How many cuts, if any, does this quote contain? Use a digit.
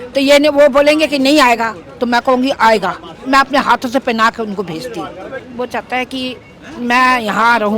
1